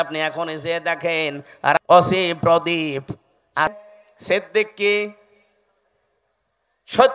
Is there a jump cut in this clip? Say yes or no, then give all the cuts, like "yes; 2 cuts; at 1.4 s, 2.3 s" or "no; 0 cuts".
yes; 2 cuts; at 1.8 s, 3.9 s